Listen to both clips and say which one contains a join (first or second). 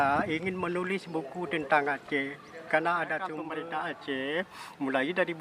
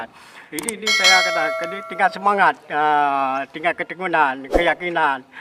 first